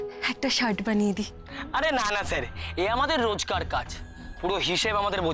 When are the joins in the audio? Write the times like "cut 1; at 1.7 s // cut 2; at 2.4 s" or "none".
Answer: cut 1; at 1.4 s